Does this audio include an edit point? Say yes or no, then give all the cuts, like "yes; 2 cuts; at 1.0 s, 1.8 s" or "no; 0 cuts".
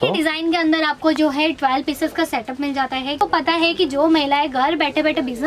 yes; 1 cut; at 3.2 s